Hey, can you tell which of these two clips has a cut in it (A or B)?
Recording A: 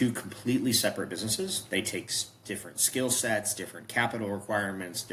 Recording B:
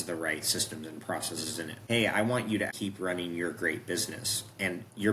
B